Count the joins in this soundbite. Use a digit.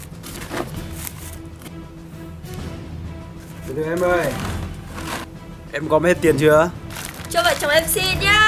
0